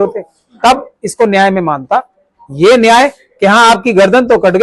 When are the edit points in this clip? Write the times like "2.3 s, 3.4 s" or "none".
none